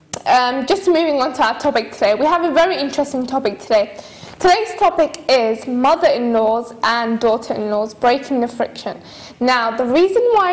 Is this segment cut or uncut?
cut